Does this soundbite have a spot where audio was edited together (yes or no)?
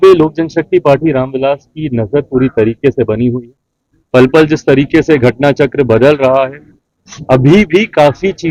no